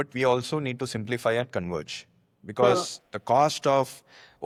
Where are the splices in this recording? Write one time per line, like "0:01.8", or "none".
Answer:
none

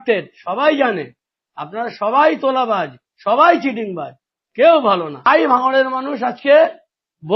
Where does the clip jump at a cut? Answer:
0:05.3

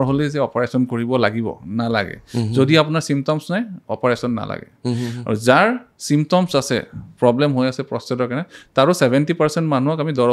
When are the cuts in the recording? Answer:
none

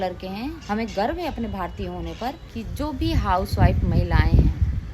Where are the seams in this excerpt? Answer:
0:02.7

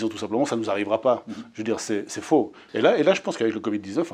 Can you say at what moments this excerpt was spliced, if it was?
0:02.6

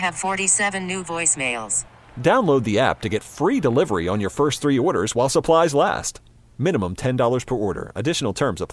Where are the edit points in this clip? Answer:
none

